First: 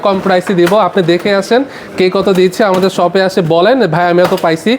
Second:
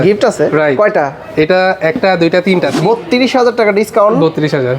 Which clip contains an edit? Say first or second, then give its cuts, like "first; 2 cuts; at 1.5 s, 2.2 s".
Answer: second; 1 cut; at 2.7 s